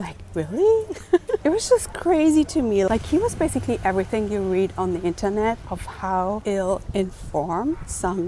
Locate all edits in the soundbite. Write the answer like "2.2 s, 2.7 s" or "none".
none